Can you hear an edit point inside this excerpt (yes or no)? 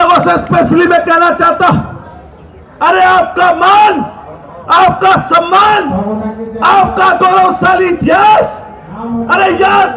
no